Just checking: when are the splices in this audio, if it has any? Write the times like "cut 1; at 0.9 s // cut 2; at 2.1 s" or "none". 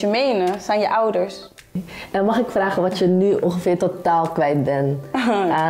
cut 1; at 1.9 s